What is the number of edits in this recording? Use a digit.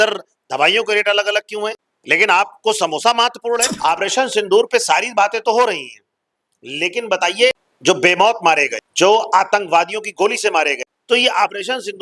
5